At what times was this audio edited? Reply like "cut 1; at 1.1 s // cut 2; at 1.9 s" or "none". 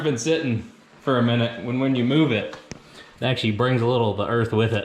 none